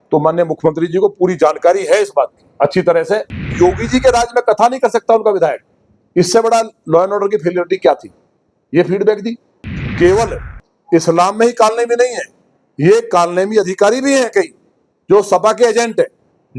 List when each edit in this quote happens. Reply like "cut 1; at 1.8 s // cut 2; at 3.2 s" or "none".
cut 1; at 3.5 s // cut 2; at 9.7 s